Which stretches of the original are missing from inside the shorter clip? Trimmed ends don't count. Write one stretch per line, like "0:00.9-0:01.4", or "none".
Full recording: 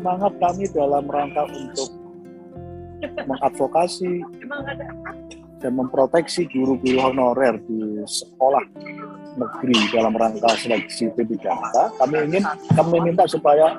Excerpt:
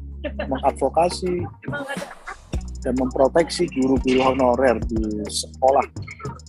none